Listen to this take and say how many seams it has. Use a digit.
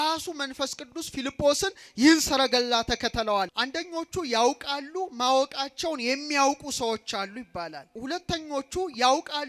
2